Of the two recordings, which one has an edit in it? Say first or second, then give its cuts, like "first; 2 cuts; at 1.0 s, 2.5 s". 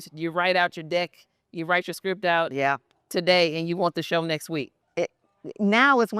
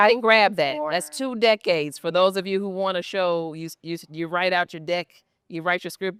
first; 1 cut; at 4.8 s